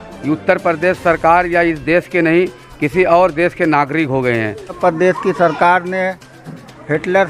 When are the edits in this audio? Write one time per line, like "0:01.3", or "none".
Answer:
0:04.8